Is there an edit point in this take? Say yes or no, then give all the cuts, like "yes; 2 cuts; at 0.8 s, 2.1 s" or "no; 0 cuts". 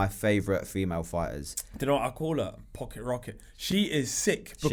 no; 0 cuts